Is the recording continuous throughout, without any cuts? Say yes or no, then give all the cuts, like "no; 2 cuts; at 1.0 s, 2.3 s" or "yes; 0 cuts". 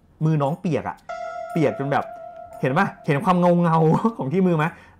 yes; 0 cuts